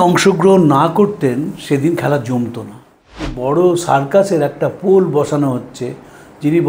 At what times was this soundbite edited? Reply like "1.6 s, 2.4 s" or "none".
3.3 s